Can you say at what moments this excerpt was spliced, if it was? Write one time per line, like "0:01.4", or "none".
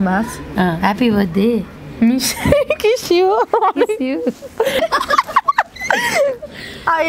0:04.8